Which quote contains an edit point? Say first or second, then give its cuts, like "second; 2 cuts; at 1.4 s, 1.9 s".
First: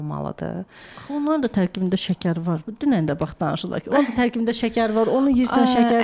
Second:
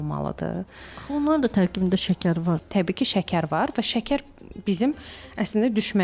second; 1 cut; at 2.6 s